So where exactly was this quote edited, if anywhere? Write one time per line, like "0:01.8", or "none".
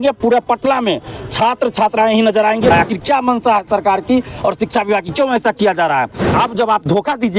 0:02.7
0:06.3